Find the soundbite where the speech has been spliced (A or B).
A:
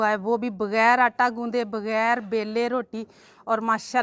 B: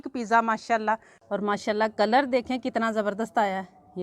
B